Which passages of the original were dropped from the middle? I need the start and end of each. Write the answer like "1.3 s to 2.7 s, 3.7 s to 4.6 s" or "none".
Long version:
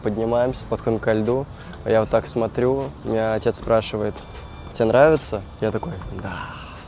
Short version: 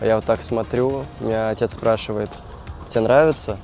none